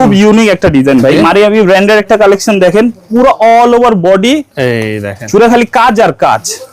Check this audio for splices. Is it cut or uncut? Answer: cut